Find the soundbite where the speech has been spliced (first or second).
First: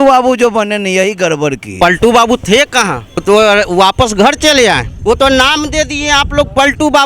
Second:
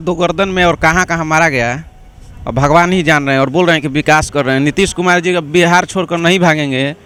first